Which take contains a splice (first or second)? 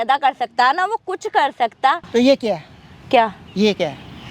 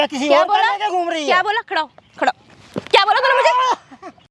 first